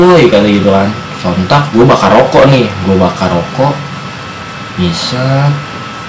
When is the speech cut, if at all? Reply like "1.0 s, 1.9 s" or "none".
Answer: 1.1 s